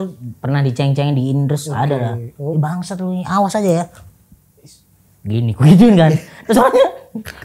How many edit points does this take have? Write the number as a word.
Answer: zero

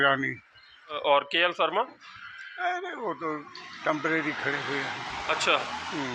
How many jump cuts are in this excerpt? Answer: one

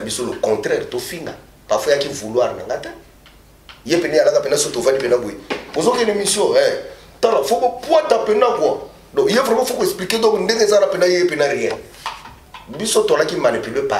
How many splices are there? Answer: zero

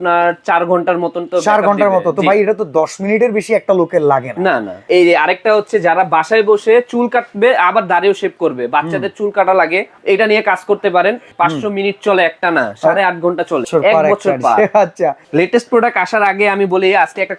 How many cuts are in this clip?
four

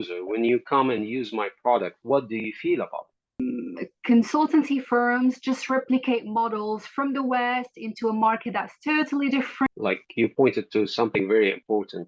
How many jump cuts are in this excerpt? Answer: two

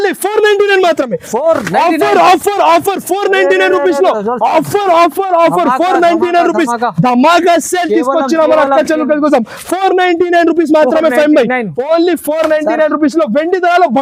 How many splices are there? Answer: zero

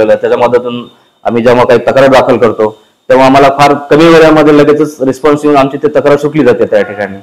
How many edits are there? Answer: zero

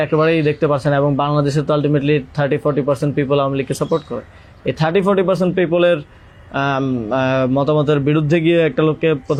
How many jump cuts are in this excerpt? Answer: zero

